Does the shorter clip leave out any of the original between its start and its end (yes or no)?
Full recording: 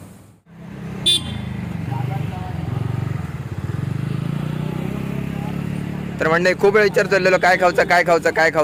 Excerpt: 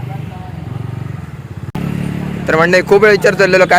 yes